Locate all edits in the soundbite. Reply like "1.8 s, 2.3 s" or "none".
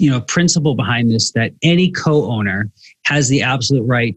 none